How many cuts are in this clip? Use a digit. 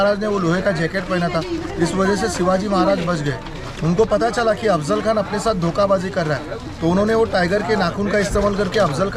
0